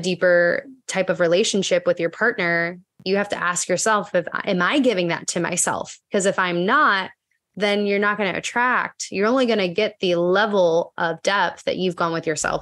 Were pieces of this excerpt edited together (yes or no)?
no